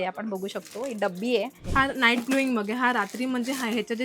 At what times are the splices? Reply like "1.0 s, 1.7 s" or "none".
1.6 s

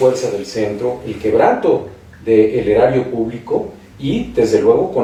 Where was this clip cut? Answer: none

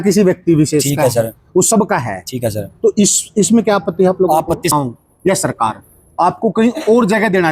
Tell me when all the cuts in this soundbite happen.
4.7 s

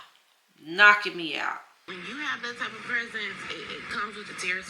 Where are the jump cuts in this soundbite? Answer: 1.9 s

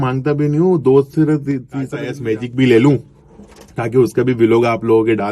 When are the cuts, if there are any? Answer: 2.0 s

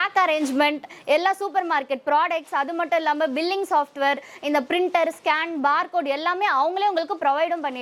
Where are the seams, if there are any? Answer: none

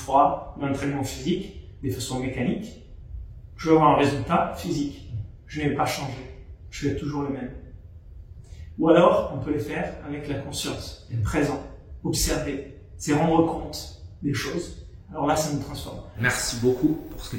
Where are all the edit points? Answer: 16.2 s

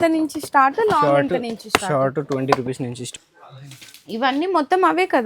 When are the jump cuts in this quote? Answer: 3.0 s

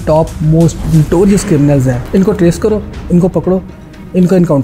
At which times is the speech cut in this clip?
0.8 s, 2.0 s

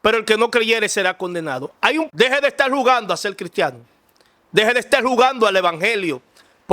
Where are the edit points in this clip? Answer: 2.1 s

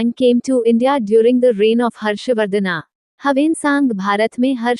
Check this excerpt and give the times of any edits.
none

